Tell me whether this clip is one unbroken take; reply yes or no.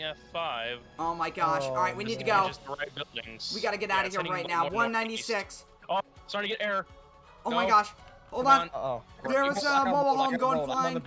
no